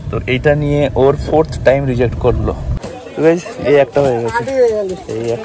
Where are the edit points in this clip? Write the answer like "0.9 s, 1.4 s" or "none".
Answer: 2.7 s